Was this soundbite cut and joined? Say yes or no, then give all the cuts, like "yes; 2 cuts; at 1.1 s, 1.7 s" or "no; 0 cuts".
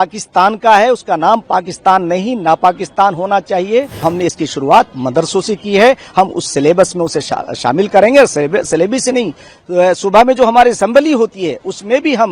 yes; 1 cut; at 4.0 s